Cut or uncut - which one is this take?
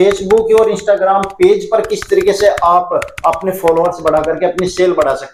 uncut